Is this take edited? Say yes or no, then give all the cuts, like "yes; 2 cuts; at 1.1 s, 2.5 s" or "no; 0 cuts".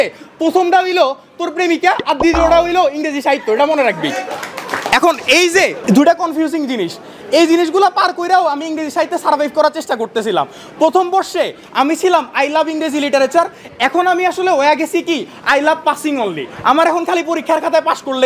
no; 0 cuts